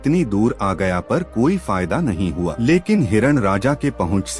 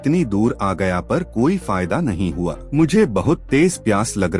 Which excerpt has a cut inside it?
first; 1 cut; at 2.6 s

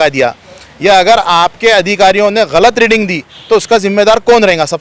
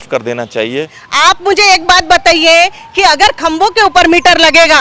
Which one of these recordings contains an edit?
second; 1 cut; at 1.0 s

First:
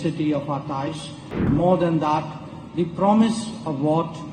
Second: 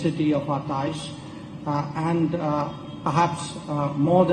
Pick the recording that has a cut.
first; 1 cut; at 1.4 s

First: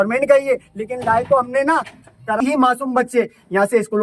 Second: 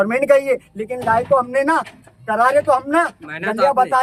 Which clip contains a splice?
first; 1 cut; at 2.4 s

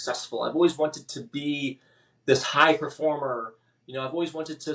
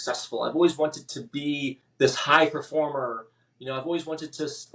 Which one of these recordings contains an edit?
second; 1 cut; at 1.8 s

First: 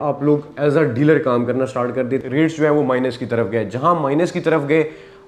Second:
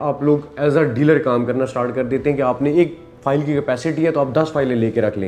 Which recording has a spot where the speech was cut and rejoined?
first; 1 cut; at 2.2 s

